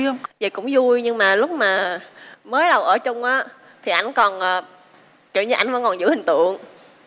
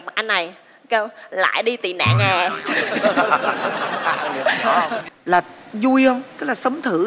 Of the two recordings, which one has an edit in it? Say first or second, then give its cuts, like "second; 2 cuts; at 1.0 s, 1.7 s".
second; 1 cut; at 5.1 s